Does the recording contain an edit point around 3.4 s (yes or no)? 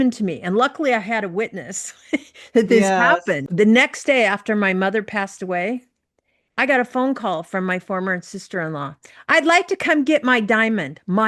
yes